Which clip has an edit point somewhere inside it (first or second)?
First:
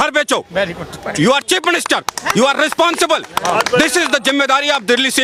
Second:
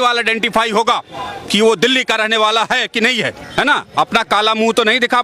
second